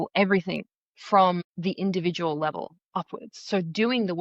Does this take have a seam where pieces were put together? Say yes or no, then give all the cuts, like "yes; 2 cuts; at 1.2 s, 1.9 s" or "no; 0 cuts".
yes; 1 cut; at 1.5 s